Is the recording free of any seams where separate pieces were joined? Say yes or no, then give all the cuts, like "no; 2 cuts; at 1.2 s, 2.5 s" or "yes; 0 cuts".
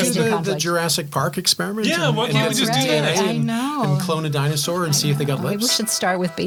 yes; 0 cuts